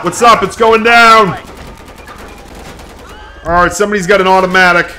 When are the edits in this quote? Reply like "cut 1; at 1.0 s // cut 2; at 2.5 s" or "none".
none